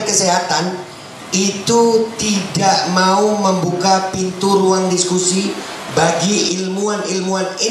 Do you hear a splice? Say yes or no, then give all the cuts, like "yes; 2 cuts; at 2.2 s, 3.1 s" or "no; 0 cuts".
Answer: no; 0 cuts